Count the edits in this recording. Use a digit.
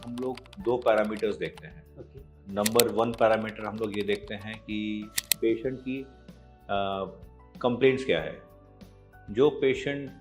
1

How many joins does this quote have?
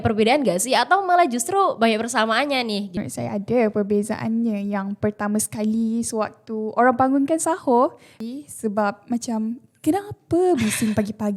2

